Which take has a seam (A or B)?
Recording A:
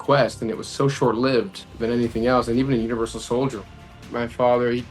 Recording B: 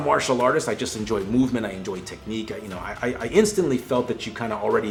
A